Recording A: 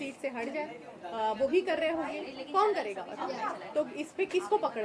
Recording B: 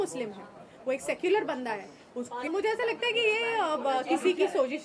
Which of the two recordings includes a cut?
B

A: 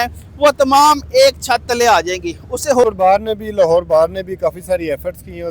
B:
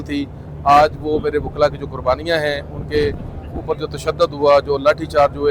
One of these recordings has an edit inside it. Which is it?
A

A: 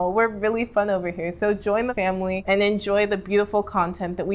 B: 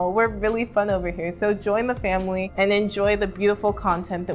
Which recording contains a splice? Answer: A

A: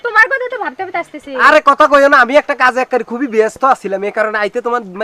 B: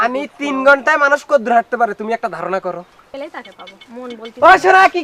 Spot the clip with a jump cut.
B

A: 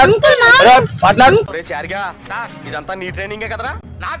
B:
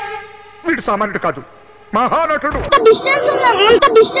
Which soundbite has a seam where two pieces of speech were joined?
B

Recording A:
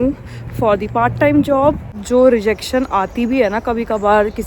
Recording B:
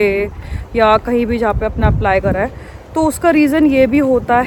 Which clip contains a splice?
A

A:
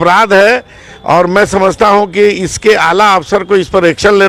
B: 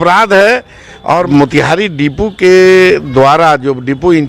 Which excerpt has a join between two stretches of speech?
B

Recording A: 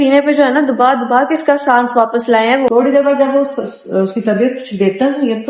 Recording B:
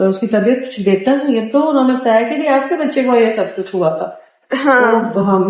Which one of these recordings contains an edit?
A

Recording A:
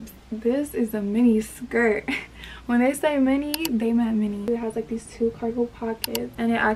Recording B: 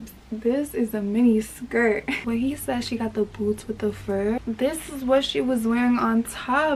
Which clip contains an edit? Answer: B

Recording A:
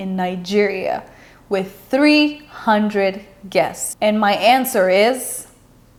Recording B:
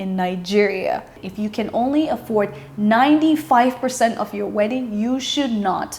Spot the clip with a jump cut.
B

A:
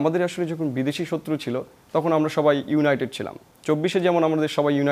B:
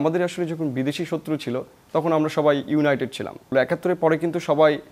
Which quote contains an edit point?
B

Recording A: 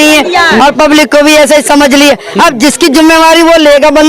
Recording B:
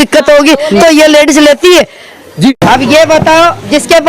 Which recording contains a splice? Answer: B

